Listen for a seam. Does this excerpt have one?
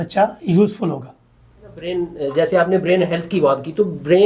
yes; 1 cut; at 1.9 s

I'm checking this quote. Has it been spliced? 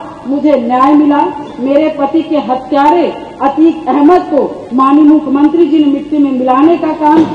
no; 0 cuts

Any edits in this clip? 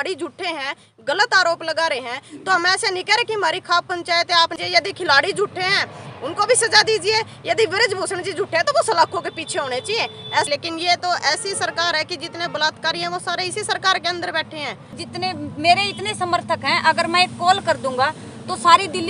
yes; 3 cuts; at 4.6 s, 10.5 s, 15.0 s

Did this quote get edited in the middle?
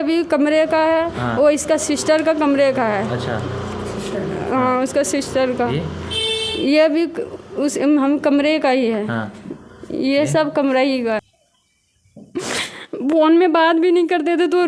yes; 1 cut; at 11.2 s

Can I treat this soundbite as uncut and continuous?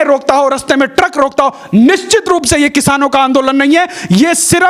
yes; 0 cuts

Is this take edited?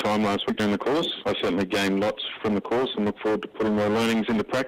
yes; 2 cuts; at 1.1 s, 2.3 s

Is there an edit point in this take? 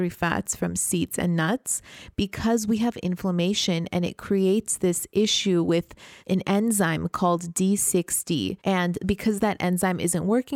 no; 0 cuts

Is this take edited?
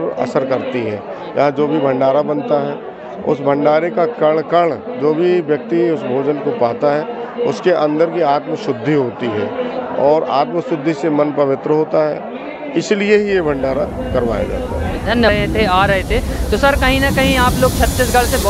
yes; 1 cut; at 15.3 s

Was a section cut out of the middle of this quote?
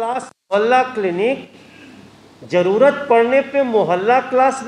no; 0 cuts

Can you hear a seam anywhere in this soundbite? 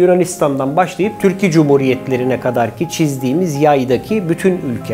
no; 0 cuts

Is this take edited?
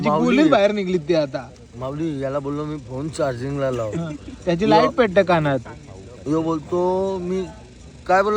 no; 0 cuts

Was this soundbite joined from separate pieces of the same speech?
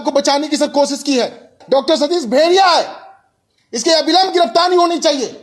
yes; 1 cut; at 1.6 s

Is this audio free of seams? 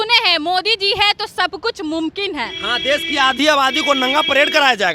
yes; 0 cuts

